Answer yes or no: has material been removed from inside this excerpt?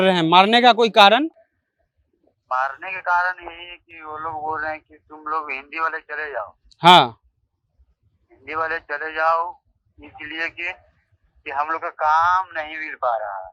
no